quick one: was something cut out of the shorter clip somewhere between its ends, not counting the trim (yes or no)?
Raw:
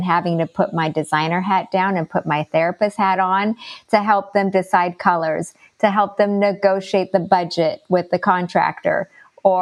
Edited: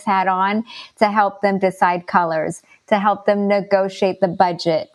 no